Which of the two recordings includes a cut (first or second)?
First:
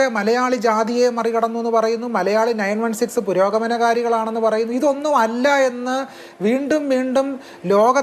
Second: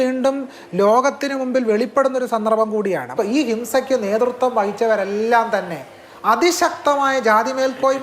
second